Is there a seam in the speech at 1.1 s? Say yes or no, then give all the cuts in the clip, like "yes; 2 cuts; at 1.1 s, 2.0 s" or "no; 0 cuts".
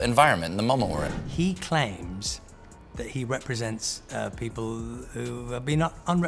yes; 1 cut; at 1.1 s